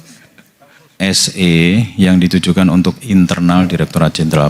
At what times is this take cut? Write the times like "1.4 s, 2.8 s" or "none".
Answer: 1.0 s